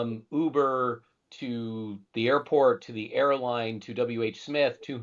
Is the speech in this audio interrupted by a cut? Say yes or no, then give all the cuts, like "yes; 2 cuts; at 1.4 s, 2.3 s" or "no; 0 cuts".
no; 0 cuts